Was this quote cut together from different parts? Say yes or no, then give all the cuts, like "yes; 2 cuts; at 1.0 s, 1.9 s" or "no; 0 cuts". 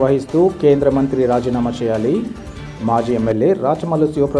no; 0 cuts